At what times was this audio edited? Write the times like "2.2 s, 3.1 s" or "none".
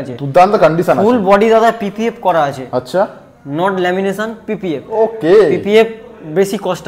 none